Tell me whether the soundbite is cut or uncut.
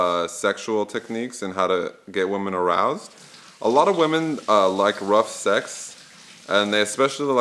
uncut